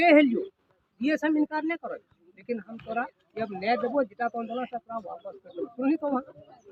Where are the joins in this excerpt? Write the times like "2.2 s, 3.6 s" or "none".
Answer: none